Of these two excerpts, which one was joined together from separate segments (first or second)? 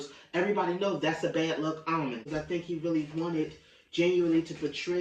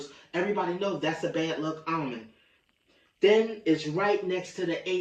first